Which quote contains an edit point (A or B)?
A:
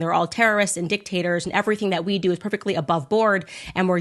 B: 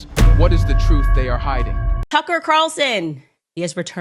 B